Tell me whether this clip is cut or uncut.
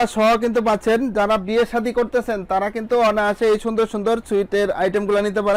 uncut